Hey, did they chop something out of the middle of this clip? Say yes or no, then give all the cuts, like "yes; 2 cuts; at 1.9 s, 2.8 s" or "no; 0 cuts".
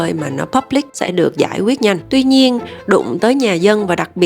yes; 1 cut; at 0.9 s